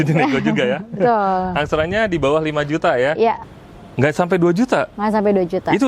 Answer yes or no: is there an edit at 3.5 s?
yes